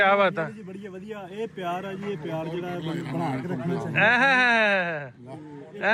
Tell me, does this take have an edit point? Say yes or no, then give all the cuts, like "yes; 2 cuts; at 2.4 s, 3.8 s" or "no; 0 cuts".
no; 0 cuts